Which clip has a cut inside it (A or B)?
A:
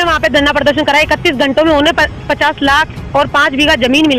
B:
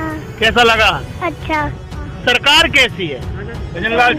B